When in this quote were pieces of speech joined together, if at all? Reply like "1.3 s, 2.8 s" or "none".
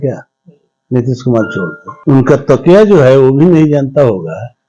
1.9 s